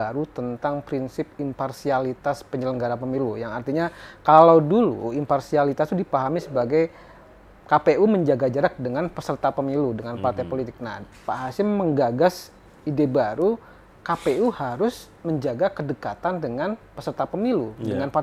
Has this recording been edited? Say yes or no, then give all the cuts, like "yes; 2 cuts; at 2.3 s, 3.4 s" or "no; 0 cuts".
no; 0 cuts